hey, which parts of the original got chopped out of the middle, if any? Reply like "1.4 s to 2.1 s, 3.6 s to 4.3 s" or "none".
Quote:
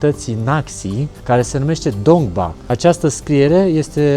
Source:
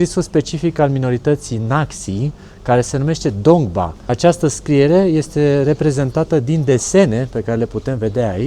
2.3 s to 2.5 s